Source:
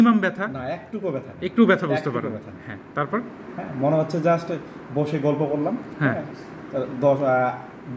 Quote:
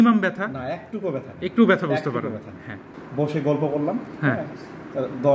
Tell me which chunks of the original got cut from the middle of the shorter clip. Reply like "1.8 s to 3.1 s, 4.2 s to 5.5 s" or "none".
2.9 s to 4.7 s